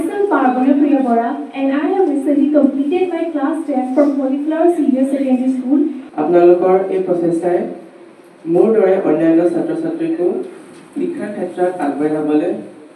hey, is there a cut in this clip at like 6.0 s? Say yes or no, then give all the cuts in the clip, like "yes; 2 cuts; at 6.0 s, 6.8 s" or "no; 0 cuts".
yes; 1 cut; at 6.0 s